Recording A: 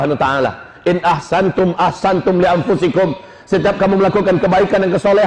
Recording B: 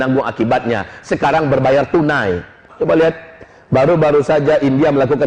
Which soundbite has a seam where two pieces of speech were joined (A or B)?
B